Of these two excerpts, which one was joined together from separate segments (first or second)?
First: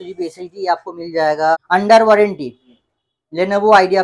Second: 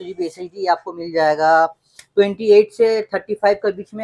first